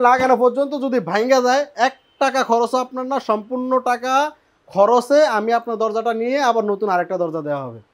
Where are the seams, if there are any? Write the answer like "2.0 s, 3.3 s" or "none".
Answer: none